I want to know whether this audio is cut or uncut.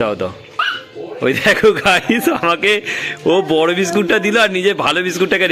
uncut